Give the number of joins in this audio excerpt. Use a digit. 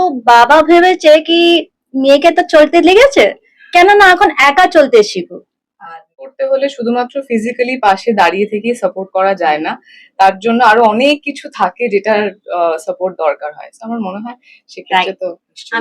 1